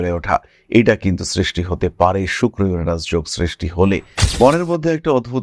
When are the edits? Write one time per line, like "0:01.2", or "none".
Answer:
0:04.2